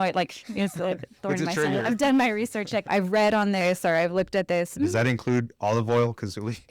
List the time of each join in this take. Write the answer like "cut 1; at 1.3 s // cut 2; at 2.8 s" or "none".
cut 1; at 2.8 s // cut 2; at 4.7 s